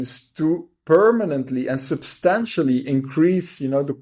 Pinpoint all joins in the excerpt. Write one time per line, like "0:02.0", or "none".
none